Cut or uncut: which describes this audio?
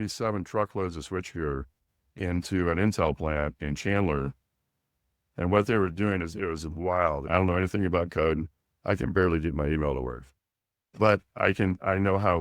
cut